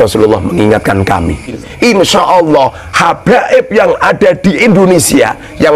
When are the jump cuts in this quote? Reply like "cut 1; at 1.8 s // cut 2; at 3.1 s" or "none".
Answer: cut 1; at 1.5 s